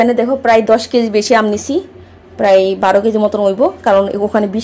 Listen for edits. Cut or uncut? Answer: uncut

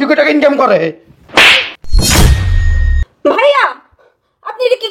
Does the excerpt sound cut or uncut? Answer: uncut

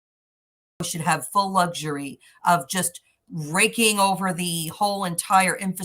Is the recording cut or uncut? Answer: uncut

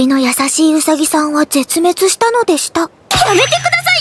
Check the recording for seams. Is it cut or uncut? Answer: uncut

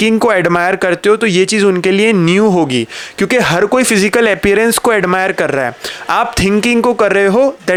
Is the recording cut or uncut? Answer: uncut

